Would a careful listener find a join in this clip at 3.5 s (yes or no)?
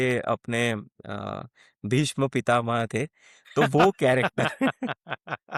no